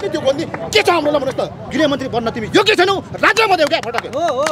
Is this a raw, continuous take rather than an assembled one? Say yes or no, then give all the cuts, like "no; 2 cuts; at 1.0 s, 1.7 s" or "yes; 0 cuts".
no; 1 cut; at 1.6 s